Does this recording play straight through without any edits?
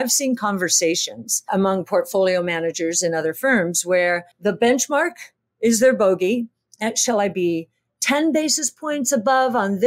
no; 2 cuts; at 1.5 s, 4.3 s

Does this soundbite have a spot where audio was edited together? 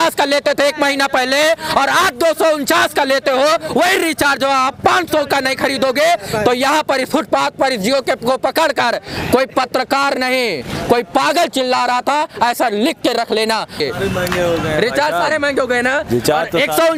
no; 0 cuts

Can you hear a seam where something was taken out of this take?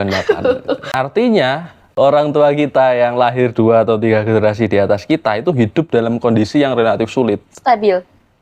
yes; 2 cuts; at 0.8 s, 1.8 s

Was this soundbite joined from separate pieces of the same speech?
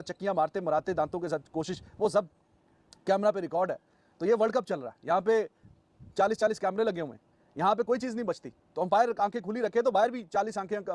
no; 0 cuts

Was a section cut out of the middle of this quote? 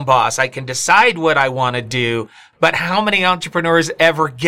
no; 0 cuts

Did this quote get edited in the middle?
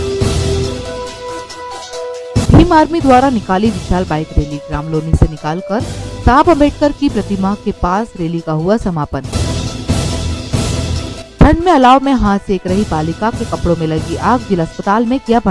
yes; 1 cut; at 1.1 s

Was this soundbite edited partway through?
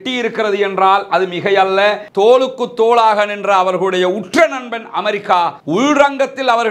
yes; 1 cut; at 2.1 s

